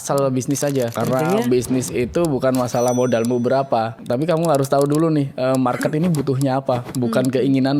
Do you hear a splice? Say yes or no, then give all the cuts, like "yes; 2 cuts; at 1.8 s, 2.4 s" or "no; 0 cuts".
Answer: yes; 2 cuts; at 1.0 s, 3.9 s